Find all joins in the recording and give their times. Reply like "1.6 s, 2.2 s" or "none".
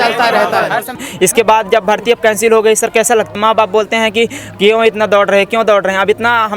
1.0 s, 3.3 s